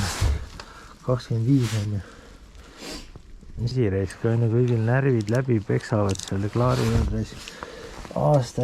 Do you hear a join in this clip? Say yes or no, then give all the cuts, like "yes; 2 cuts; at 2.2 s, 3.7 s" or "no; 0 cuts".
yes; 1 cut; at 3.7 s